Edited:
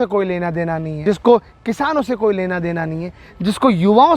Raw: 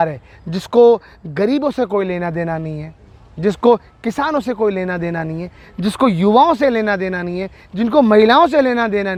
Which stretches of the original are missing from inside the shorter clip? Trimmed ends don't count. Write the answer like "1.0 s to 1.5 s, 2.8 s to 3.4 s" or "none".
2.7 s to 3.3 s